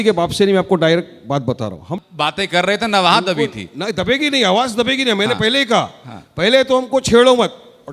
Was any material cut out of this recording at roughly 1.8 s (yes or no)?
yes